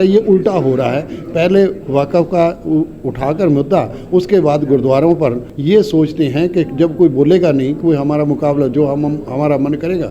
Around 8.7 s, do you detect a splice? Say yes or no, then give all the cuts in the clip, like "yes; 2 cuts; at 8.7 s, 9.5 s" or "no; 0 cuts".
no; 1 cut; at 5.5 s